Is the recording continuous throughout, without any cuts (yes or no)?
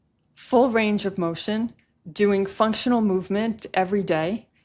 yes